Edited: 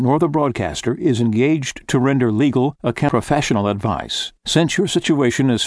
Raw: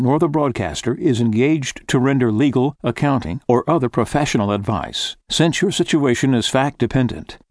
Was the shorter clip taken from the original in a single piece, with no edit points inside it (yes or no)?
no